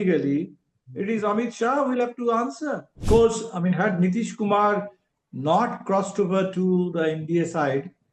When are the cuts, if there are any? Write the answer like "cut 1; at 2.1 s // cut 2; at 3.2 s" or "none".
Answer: cut 1; at 2.9 s